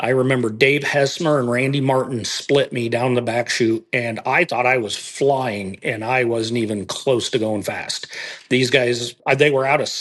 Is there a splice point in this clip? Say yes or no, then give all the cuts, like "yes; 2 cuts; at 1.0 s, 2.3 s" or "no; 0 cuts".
yes; 1 cut; at 9.1 s